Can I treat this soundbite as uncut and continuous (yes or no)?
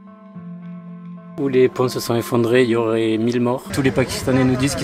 no